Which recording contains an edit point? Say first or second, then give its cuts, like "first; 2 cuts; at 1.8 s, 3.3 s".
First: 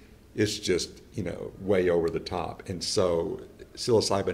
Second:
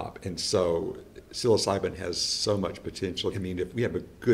second; 1 cut; at 3.3 s